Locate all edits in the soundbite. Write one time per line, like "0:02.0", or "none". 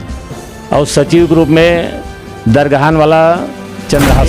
none